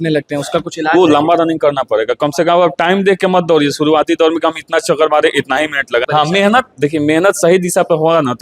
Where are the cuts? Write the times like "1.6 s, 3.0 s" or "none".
6.1 s